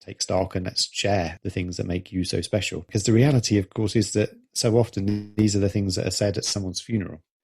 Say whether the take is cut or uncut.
cut